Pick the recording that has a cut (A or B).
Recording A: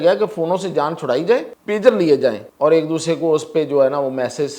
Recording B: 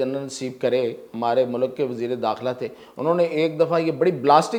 A